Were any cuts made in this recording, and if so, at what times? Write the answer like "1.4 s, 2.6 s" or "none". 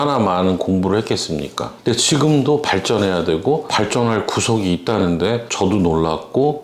1.7 s